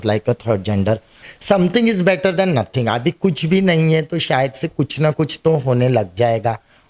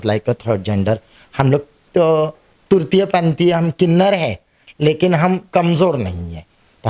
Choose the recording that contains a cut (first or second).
first